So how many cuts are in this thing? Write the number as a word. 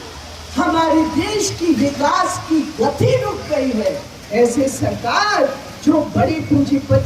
one